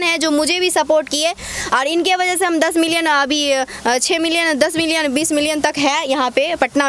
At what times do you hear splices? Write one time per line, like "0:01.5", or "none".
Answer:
none